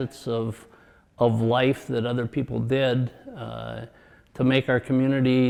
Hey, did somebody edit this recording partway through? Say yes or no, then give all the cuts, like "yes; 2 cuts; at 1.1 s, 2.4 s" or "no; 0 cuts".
no; 0 cuts